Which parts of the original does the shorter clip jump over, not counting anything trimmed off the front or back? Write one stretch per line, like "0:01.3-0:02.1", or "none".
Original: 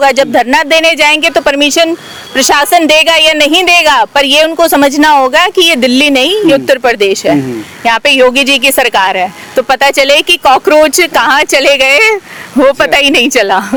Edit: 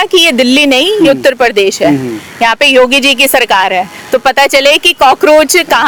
none